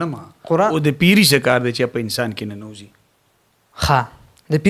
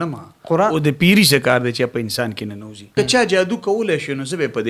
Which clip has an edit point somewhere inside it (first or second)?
second